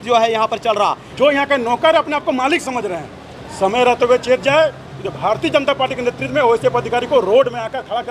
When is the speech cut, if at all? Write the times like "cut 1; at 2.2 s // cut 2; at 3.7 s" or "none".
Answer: cut 1; at 1.0 s